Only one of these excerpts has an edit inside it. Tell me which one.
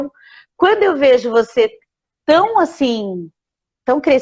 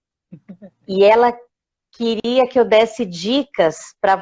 second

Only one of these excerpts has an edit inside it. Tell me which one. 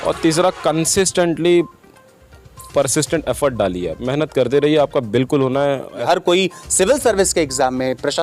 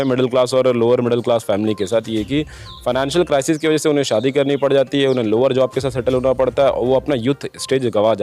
first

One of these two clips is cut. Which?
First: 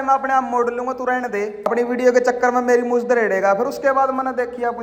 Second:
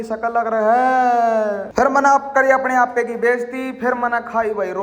second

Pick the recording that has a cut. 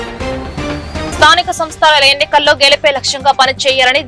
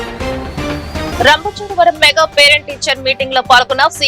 first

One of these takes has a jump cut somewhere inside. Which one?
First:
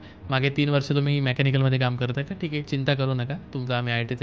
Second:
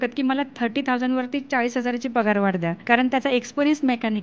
second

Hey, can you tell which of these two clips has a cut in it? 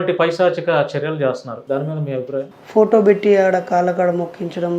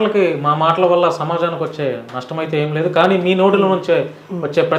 first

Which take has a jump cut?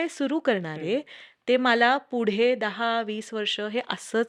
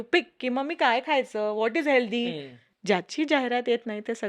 second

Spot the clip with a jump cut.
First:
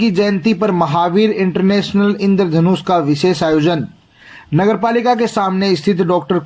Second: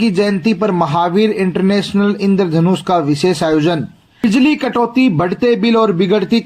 second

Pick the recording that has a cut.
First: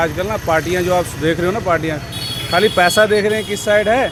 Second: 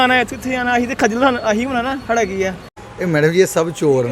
second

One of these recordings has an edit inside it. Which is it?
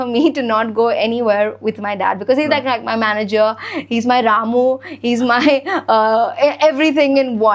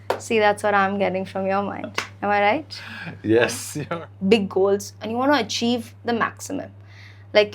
second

